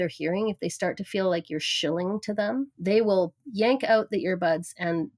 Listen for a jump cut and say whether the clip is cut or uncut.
cut